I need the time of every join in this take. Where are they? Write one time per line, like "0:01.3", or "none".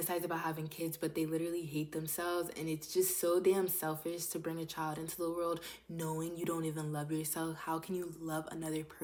none

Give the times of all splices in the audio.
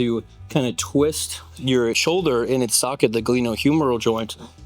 0:02.0

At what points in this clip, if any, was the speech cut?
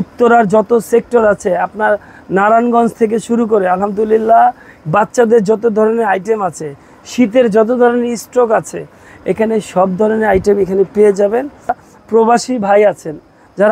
0:04.7
0:11.8

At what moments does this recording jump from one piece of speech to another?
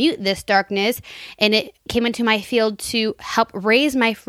0:01.9

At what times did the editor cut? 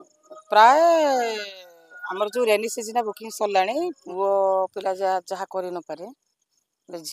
0:04.0

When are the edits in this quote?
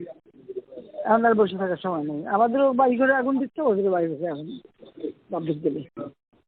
none

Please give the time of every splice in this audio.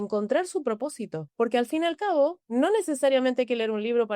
0:01.2
0:02.4

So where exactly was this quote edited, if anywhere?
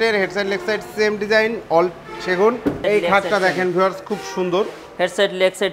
0:02.8

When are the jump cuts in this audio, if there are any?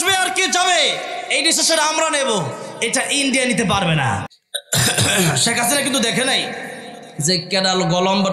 0:04.3

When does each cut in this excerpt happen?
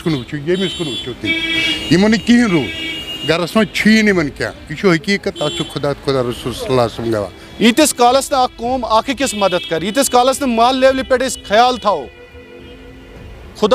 0:07.4

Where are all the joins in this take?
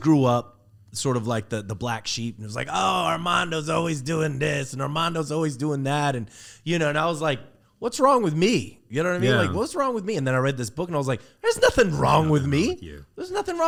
none

